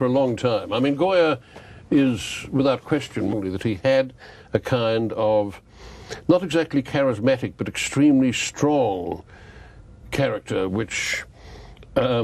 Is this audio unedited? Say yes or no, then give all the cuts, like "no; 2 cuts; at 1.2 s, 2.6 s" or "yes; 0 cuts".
yes; 0 cuts